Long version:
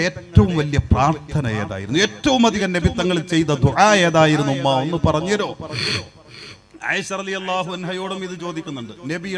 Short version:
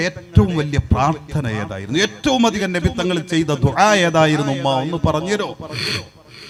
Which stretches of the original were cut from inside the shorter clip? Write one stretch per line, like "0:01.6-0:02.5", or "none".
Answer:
none